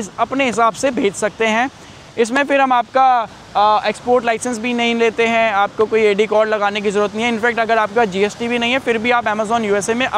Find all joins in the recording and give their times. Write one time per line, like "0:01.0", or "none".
none